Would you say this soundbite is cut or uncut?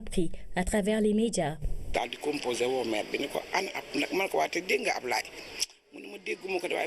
cut